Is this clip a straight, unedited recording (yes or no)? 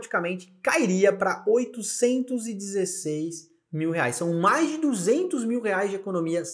yes